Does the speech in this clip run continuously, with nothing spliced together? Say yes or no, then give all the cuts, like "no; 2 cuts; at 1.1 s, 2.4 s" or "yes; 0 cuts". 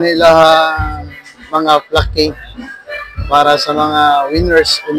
yes; 0 cuts